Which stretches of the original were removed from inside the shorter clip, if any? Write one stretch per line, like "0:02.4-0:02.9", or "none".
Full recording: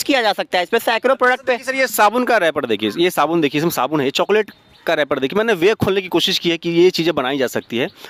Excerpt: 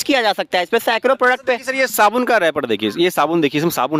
none